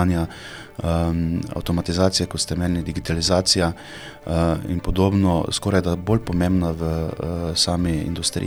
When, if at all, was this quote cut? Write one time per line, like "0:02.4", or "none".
none